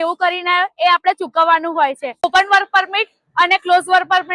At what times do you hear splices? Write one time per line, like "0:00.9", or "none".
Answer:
0:02.2